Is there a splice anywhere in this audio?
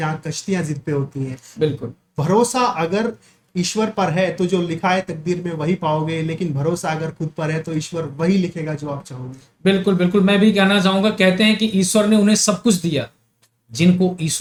no; 0 cuts

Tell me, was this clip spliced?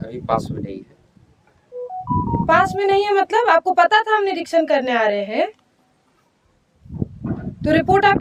no; 0 cuts

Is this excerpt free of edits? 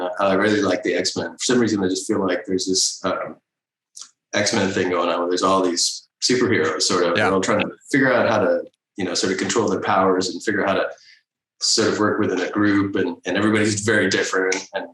yes; 0 cuts

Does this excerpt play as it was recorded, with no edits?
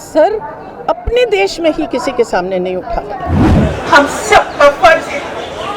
no; 1 cut; at 3.5 s

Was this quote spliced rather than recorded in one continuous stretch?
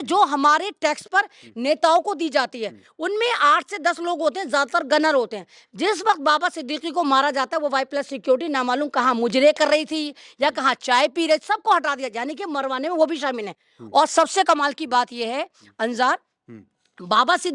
no; 0 cuts

